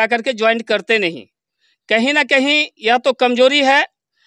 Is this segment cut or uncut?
uncut